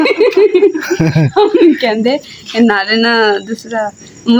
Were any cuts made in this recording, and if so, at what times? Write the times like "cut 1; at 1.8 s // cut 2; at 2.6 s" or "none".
none